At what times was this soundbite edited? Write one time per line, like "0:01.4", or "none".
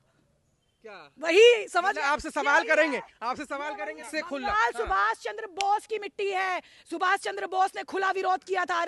0:04.1